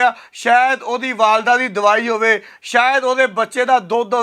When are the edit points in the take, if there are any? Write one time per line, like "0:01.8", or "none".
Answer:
none